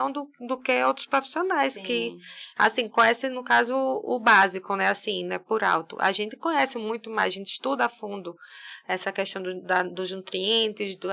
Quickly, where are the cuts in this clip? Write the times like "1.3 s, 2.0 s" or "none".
none